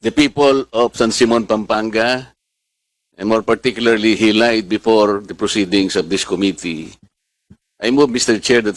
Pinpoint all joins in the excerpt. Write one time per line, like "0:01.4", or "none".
none